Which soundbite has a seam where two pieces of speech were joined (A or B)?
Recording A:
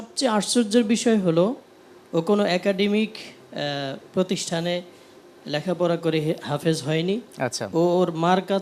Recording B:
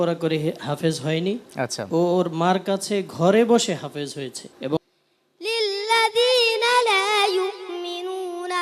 B